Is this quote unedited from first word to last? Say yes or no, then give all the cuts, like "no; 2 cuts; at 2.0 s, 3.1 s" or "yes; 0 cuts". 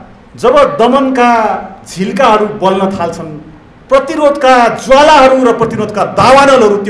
yes; 0 cuts